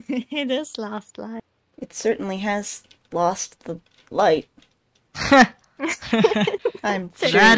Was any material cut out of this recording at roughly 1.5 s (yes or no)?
yes